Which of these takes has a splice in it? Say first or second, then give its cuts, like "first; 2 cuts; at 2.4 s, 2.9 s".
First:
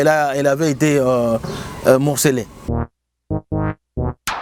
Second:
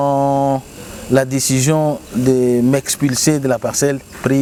first; 1 cut; at 2.7 s